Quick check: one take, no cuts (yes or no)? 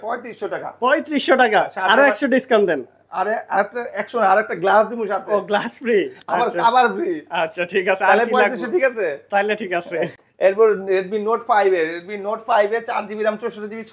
yes